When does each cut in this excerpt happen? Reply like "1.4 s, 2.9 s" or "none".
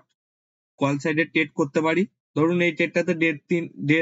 2.2 s